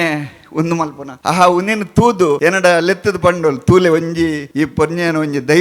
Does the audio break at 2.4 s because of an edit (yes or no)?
yes